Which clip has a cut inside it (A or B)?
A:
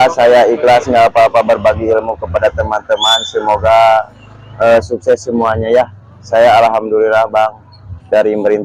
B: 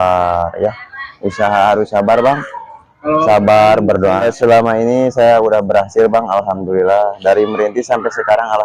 B